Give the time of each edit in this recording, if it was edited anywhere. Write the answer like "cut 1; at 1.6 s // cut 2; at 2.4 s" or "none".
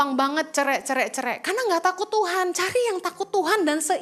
none